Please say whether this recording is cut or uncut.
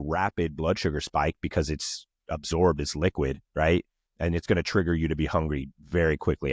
uncut